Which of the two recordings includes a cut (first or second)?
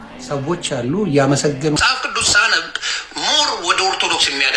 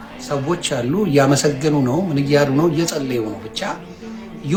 first